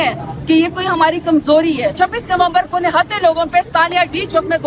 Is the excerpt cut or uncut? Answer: cut